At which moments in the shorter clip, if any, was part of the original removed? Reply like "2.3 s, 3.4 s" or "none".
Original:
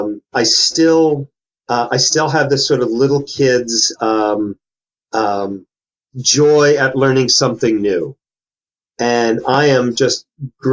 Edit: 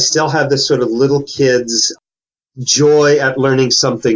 2.0 s